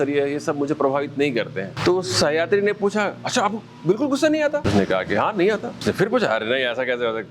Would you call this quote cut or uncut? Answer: cut